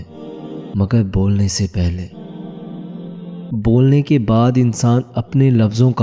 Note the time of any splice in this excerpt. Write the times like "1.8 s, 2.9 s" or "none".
2.2 s, 3.5 s